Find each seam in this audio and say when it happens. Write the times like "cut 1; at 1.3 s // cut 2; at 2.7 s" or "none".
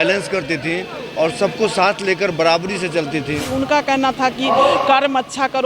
cut 1; at 3.5 s